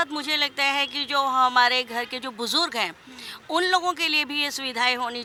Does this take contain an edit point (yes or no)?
no